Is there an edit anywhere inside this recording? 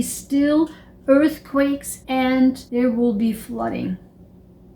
yes; 2 cuts; at 1.9 s, 2.6 s

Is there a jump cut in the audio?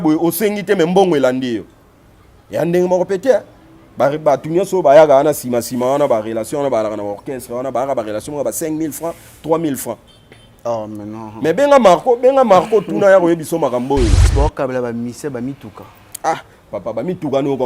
yes; 1 cut; at 14.2 s

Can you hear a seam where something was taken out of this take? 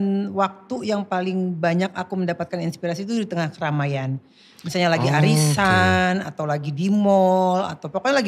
no; 0 cuts

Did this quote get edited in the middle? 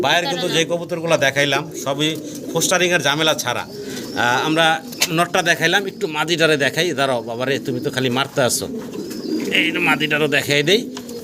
no; 0 cuts

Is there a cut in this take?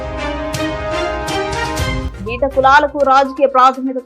yes; 1 cut; at 2.0 s

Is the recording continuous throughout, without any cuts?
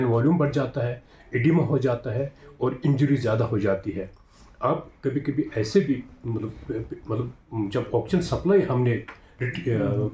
yes; 0 cuts

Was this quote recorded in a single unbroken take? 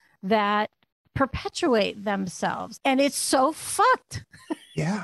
no; 1 cut; at 2.7 s

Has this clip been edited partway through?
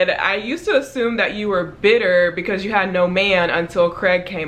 no; 0 cuts

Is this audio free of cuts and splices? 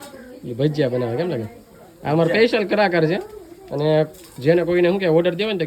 yes; 0 cuts

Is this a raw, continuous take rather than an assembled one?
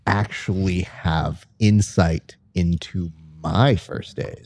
yes; 0 cuts

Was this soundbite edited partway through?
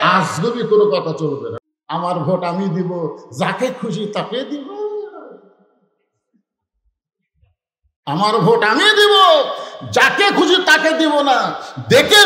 yes; 1 cut; at 1.5 s

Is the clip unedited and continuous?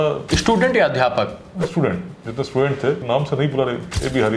no; 1 cut; at 3.0 s

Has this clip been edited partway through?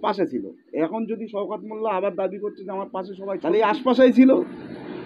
yes; 1 cut; at 3.3 s

